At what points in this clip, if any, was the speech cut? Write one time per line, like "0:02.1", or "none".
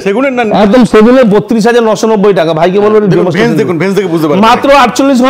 none